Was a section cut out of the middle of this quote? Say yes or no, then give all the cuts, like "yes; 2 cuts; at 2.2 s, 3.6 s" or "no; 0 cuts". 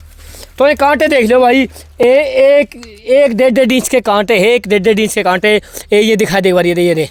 no; 0 cuts